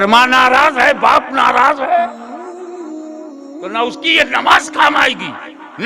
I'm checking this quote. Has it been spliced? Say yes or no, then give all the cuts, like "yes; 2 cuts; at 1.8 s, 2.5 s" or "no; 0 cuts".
no; 0 cuts